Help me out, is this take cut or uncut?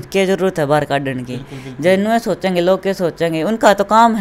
uncut